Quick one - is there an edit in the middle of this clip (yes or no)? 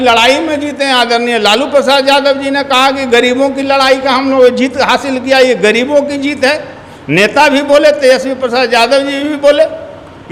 no